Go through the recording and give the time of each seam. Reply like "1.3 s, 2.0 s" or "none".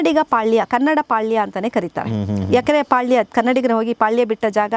none